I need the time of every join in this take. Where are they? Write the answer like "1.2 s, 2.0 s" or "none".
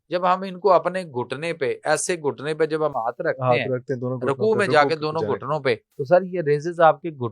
5.9 s